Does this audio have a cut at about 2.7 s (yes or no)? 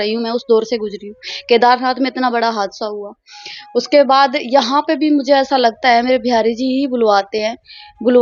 no